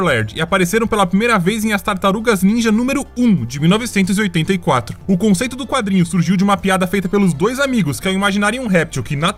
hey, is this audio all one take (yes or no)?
yes